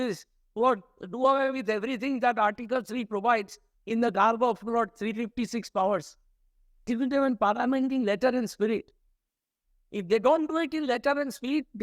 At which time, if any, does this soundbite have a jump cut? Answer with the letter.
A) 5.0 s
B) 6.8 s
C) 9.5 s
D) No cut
B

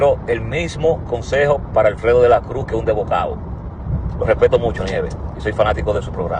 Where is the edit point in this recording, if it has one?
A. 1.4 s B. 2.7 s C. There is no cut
C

